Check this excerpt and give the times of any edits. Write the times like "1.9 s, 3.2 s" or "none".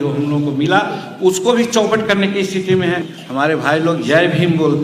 3.1 s